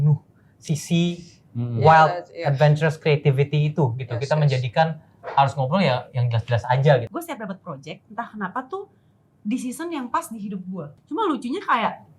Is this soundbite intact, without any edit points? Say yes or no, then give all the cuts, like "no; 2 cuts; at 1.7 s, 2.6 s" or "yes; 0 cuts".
no; 2 cuts; at 7.1 s, 10.9 s